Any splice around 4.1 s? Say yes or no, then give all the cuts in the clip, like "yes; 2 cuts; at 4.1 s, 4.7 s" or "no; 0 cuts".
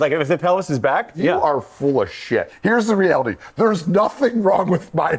no; 2 cuts; at 1.1 s, 2.5 s